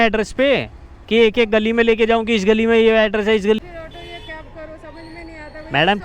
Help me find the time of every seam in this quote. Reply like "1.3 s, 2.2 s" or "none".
3.6 s